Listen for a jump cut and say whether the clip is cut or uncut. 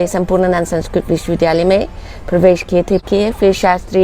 cut